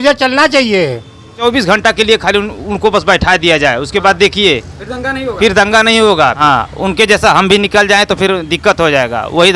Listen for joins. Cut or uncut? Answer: cut